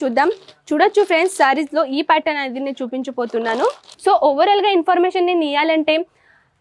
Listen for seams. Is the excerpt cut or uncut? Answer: cut